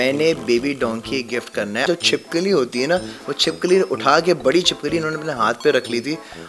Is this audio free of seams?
no; 1 cut; at 1.9 s

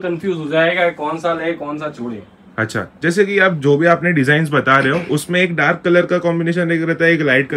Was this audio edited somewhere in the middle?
no; 0 cuts

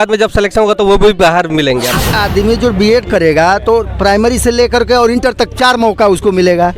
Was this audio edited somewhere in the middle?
yes; 1 cut; at 2.1 s

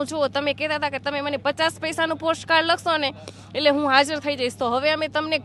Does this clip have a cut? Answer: no; 0 cuts

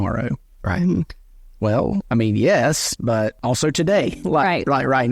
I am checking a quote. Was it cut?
yes; 3 cuts; at 2.1 s, 3.4 s, 4.2 s

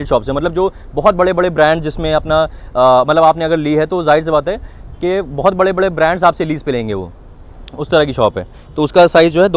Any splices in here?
no; 0 cuts

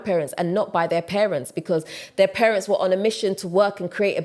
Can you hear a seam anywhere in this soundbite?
no; 0 cuts

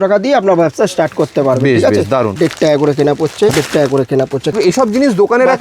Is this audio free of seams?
no; 3 cuts; at 2.3 s, 3.5 s, 4.5 s

